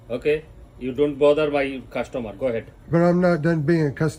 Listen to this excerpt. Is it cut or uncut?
uncut